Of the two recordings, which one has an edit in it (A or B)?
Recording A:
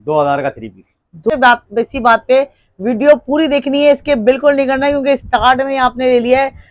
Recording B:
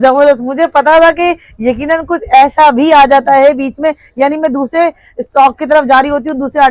A